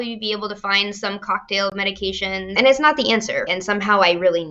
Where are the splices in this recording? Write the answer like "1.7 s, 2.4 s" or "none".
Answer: 2.5 s, 3.5 s